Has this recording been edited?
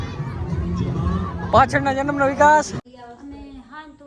yes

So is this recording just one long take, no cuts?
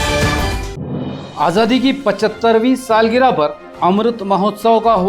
no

